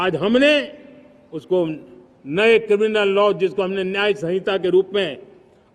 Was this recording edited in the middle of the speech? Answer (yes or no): no